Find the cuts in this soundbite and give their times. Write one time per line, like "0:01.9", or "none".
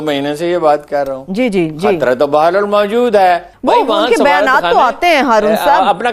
0:03.5